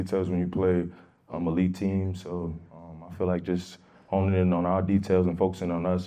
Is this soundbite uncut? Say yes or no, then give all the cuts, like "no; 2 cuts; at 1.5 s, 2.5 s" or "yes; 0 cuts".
yes; 0 cuts